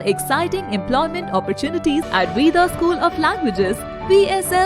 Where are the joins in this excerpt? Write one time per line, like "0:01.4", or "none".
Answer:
0:02.1